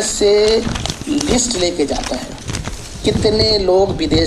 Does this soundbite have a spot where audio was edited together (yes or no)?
no